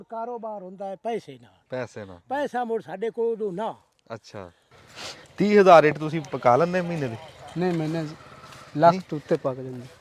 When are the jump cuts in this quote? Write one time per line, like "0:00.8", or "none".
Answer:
0:04.7